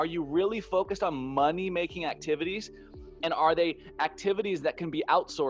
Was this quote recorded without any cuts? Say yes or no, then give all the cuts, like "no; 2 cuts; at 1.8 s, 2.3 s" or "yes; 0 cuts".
yes; 0 cuts